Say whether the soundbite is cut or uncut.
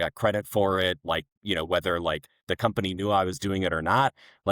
cut